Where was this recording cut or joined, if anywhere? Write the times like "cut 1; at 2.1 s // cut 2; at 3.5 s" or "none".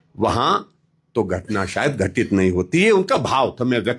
none